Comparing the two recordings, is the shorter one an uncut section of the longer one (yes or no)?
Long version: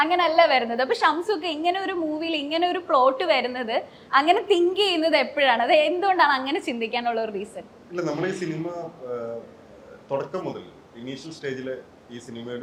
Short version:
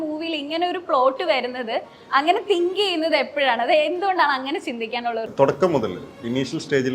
no